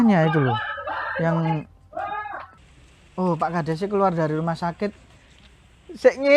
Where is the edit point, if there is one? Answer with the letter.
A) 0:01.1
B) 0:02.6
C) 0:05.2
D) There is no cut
B